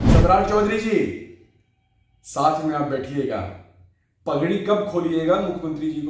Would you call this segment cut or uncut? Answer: uncut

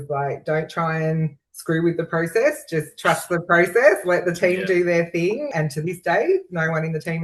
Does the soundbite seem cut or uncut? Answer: uncut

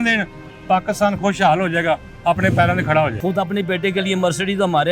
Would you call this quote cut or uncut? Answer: cut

